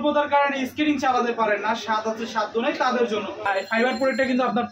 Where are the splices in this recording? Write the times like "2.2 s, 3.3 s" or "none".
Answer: 3.4 s